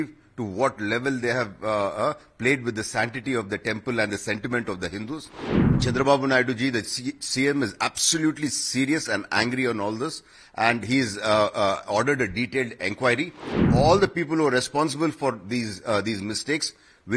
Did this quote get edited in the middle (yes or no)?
yes